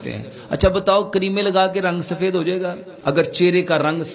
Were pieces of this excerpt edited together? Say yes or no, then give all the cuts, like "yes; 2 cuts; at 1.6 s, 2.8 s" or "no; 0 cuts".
yes; 1 cut; at 2.9 s